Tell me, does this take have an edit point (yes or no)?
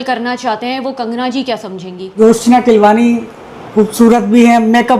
yes